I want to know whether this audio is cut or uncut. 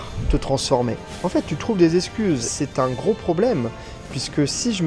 cut